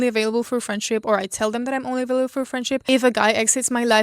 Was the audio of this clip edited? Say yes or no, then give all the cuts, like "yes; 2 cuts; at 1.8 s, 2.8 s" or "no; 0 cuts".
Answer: yes; 1 cut; at 2.8 s